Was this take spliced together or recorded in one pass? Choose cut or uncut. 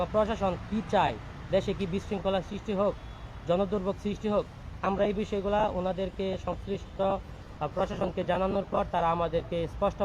uncut